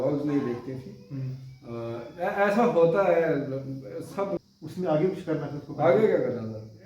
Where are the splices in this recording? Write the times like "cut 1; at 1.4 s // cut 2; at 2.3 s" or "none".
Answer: cut 1; at 4.4 s